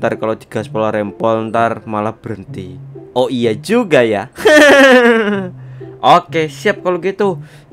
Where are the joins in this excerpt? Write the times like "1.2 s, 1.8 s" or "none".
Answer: none

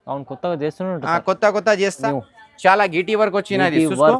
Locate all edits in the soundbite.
2.0 s

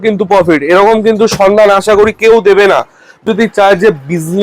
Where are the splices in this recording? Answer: 3.3 s

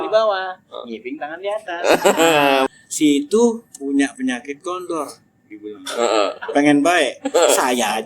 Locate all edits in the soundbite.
2.7 s

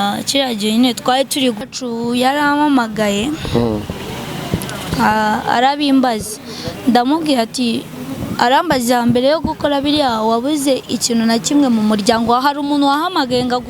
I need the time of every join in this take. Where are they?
1.7 s

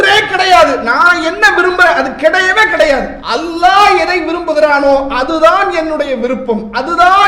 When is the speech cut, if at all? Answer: 3.2 s

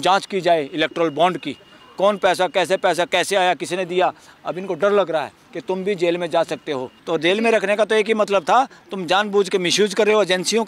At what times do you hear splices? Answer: 4.3 s, 6.9 s

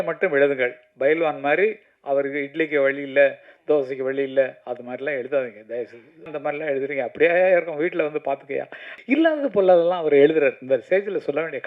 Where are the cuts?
6.3 s, 8.9 s

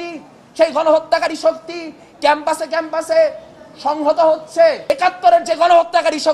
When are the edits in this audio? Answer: 4.9 s

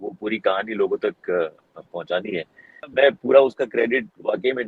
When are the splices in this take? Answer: 2.9 s

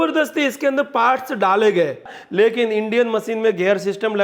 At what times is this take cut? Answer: 2.2 s

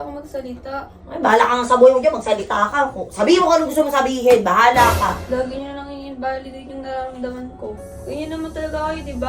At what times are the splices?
7.9 s

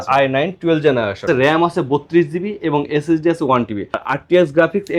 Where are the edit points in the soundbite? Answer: none

